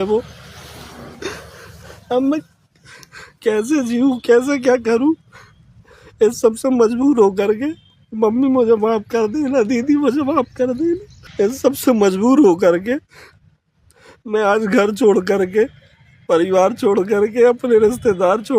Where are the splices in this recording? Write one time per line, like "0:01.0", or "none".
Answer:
0:11.2

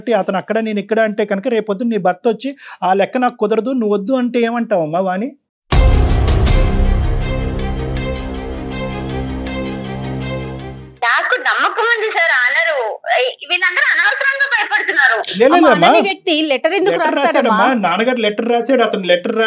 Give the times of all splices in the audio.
none

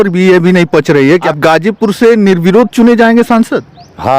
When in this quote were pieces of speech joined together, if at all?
0:01.3

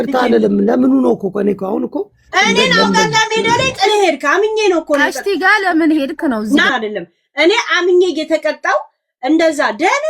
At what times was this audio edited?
0:06.7

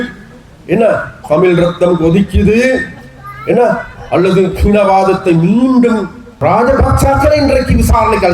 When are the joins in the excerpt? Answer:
0:06.2

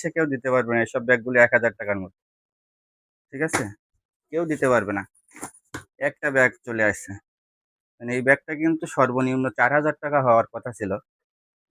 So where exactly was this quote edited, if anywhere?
none

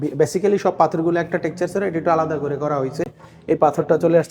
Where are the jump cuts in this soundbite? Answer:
none

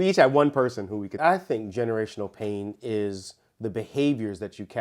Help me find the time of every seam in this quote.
0:01.2

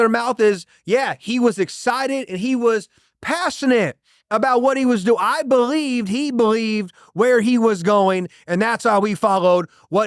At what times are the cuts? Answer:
none

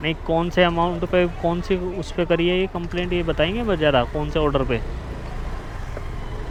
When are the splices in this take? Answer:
none

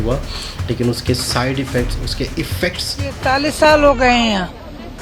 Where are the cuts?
0:03.1

